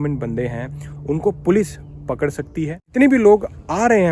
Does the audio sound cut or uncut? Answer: cut